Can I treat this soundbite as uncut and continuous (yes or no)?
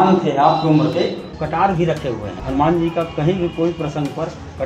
no